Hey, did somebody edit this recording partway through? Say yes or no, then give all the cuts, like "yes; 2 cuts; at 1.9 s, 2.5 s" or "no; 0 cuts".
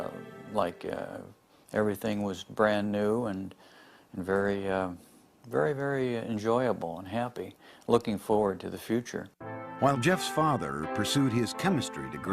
no; 0 cuts